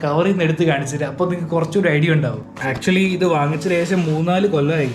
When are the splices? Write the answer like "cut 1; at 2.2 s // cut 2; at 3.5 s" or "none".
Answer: cut 1; at 2.5 s

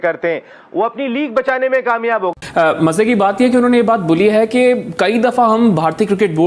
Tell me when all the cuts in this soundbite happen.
cut 1; at 2.3 s

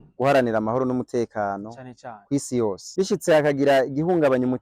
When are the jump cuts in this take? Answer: cut 1; at 2.8 s

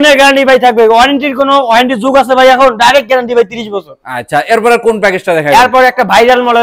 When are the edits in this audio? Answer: none

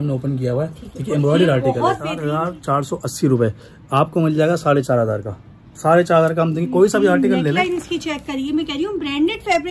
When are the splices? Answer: cut 1; at 2.1 s

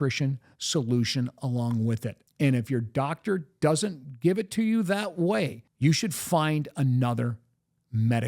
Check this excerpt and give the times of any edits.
cut 1; at 2.2 s // cut 2; at 5.6 s

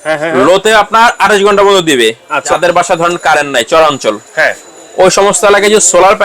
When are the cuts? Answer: cut 1; at 2.6 s

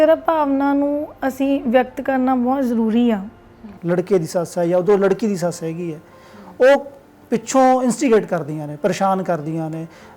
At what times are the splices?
cut 1; at 3.7 s

